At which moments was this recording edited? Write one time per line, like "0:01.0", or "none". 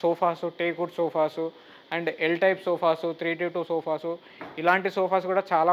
none